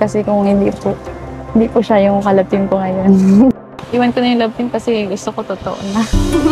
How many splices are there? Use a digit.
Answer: 1